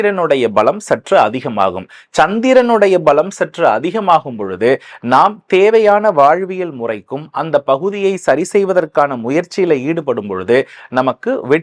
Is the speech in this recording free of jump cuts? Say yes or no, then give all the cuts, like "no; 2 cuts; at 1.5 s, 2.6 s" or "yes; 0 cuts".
yes; 0 cuts